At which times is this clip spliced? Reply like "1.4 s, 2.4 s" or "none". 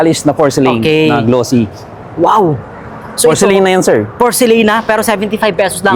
none